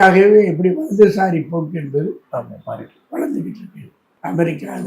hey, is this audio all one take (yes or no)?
yes